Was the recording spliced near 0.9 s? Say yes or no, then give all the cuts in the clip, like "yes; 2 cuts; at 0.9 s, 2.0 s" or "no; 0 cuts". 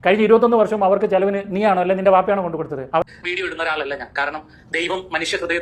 no; 1 cut; at 3.0 s